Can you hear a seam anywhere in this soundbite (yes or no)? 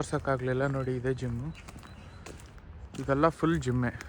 no